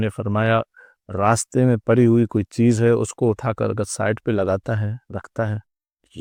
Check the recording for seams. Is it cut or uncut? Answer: uncut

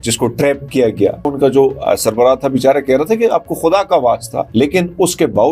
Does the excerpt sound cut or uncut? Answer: cut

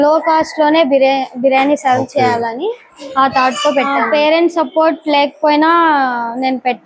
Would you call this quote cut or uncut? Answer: uncut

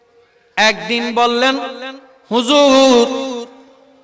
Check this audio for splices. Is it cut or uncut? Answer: uncut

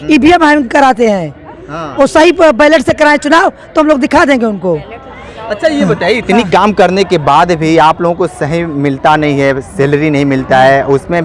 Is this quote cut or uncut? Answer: uncut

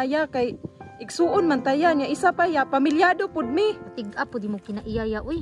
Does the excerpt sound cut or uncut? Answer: cut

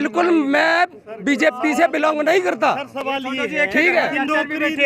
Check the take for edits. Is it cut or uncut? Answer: uncut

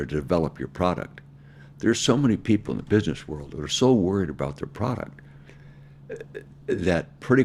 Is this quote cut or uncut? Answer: uncut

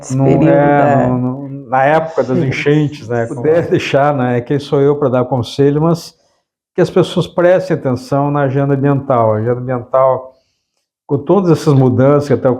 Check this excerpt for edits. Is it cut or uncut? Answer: cut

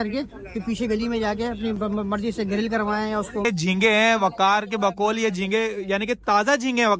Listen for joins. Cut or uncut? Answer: cut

